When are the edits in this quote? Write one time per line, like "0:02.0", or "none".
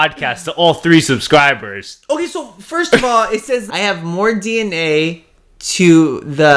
0:03.7